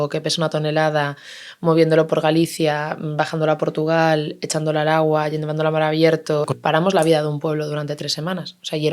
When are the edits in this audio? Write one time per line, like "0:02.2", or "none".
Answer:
0:06.5